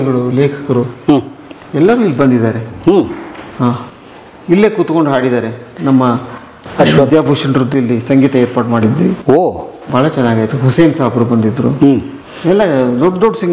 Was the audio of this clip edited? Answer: no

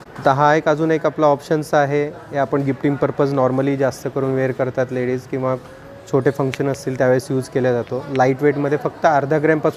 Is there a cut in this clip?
no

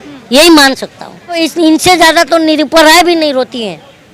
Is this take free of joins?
no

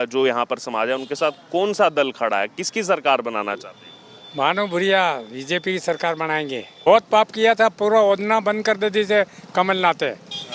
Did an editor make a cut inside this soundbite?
yes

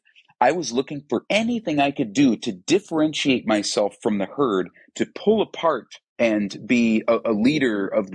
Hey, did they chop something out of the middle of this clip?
yes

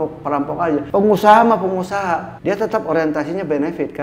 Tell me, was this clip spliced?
yes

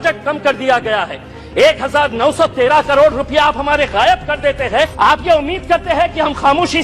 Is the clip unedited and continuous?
no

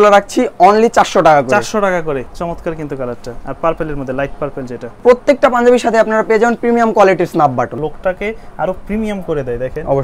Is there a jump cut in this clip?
yes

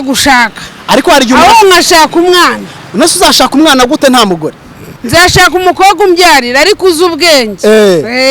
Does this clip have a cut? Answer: yes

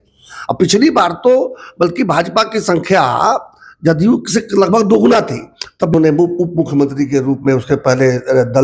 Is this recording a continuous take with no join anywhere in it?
no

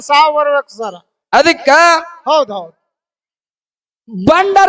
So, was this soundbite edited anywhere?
no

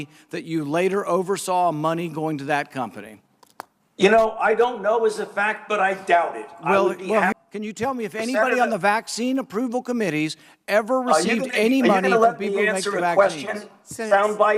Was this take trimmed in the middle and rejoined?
yes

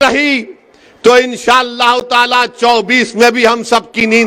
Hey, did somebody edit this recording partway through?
no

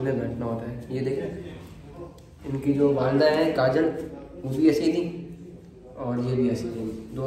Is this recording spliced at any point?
no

